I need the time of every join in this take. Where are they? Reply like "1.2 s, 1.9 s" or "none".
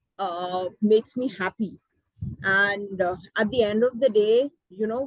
none